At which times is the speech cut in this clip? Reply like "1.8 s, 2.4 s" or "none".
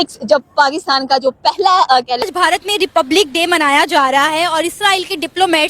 2.2 s

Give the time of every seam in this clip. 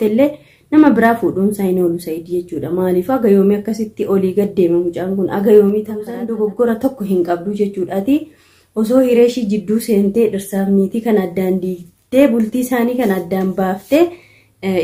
6.2 s

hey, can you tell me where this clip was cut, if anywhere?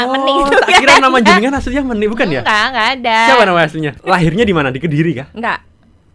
3.9 s

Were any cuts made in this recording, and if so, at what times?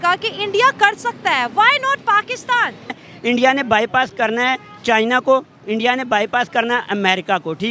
3.1 s

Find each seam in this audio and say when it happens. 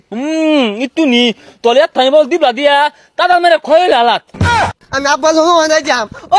4.5 s

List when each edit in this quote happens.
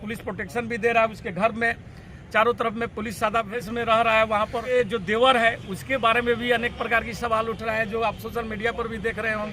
3.5 s, 4.7 s

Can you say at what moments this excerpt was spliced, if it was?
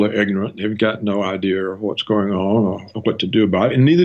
2.9 s

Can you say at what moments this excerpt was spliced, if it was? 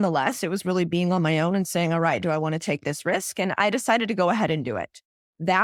none

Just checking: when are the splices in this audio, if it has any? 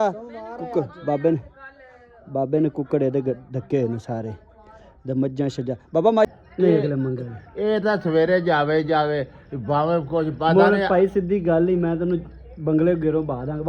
6.3 s

